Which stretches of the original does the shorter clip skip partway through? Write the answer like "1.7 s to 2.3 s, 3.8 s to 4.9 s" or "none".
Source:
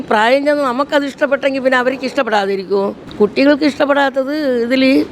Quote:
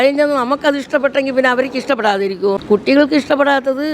2.9 s to 3.1 s